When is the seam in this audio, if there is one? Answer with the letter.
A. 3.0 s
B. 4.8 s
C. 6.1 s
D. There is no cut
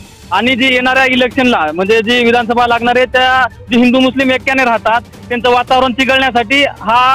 D